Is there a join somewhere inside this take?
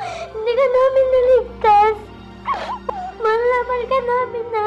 no; 0 cuts

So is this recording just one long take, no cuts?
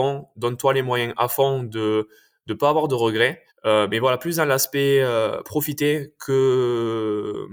yes; 0 cuts

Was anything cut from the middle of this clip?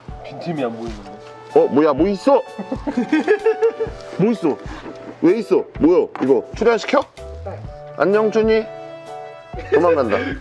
yes; 1 cut; at 6.5 s

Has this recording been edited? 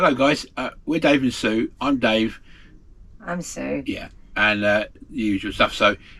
no; 0 cuts

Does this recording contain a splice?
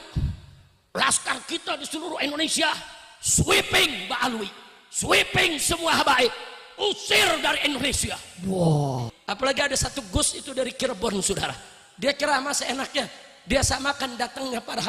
yes; 1 cut; at 9.1 s

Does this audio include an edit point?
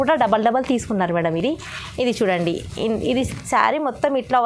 no; 0 cuts

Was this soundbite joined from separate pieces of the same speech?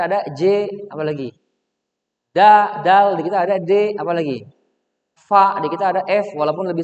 no; 0 cuts

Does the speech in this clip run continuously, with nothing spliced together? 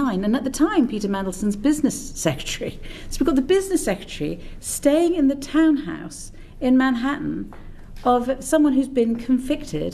yes; 0 cuts

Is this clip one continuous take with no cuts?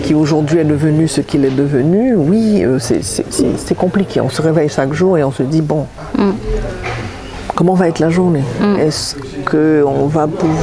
yes; 0 cuts

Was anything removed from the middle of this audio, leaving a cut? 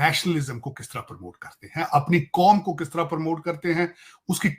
no; 0 cuts

